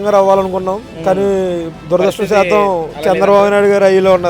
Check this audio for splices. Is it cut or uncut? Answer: uncut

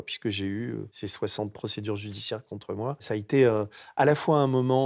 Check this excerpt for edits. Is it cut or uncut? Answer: cut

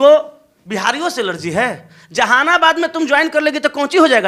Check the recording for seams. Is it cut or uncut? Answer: uncut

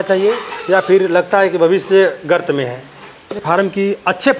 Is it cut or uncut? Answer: cut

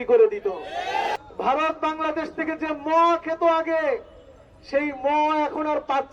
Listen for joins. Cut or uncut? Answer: cut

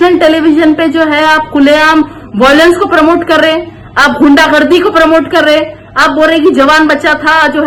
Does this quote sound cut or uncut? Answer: uncut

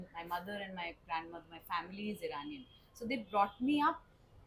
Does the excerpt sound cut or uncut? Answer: uncut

